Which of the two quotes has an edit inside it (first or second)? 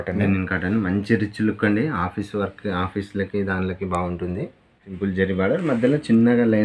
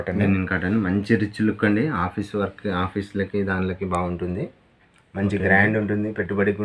first